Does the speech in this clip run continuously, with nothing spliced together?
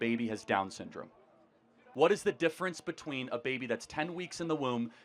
no; 1 cut; at 1.8 s

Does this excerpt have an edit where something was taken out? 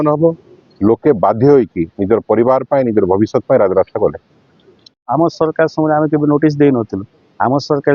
yes; 1 cut; at 5.0 s

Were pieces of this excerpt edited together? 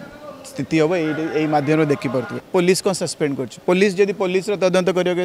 yes; 1 cut; at 2.4 s

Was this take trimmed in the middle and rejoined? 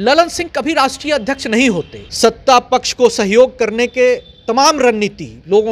yes; 1 cut; at 2.0 s

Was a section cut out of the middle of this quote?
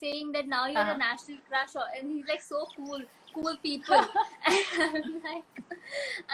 no; 0 cuts

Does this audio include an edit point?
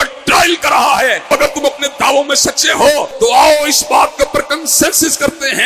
yes; 2 cuts; at 1.3 s, 3.1 s

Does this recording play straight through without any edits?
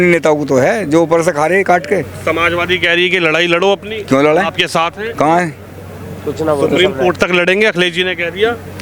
yes; 0 cuts

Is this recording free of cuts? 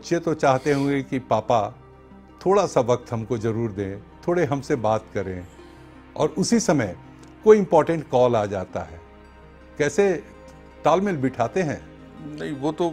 yes; 0 cuts

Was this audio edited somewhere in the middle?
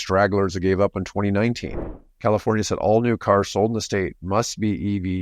yes; 1 cut; at 1.8 s

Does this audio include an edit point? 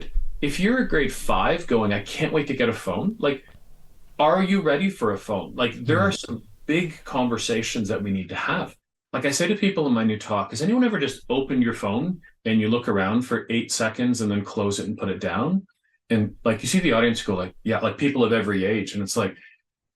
yes; 1 cut; at 8.8 s

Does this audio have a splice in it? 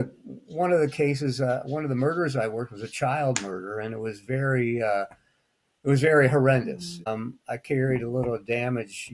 yes; 1 cut; at 7.1 s

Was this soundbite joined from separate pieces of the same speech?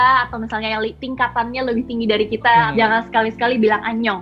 yes; 1 cut; at 2.7 s

